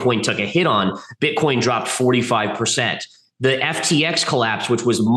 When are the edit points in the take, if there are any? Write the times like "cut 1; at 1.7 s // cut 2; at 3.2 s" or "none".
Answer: none

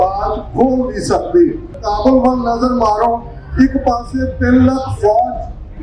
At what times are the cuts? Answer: cut 1; at 1.8 s

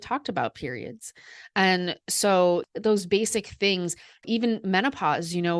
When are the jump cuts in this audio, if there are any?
cut 1; at 2.7 s // cut 2; at 4.2 s

